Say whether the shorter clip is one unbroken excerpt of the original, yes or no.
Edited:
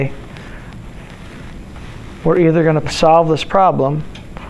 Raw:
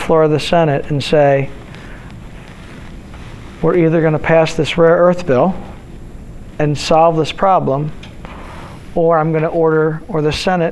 no